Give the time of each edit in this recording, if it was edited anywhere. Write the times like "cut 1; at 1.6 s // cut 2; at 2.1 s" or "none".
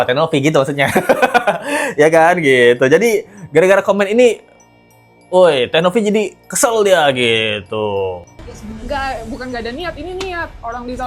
none